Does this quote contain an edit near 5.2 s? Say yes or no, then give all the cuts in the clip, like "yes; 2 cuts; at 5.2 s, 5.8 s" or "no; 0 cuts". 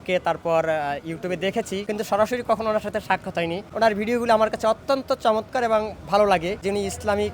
no; 3 cuts; at 1.8 s, 3.6 s, 6.6 s